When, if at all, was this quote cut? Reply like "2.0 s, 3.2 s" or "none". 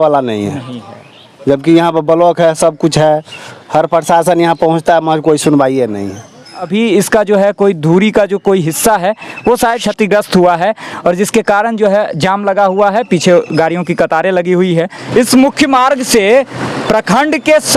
none